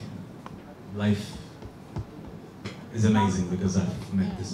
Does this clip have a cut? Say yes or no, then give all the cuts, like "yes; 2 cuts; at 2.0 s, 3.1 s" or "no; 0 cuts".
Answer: no; 0 cuts